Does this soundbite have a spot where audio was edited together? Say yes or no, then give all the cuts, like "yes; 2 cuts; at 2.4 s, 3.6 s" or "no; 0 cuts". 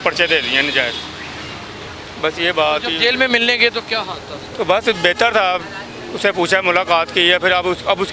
no; 0 cuts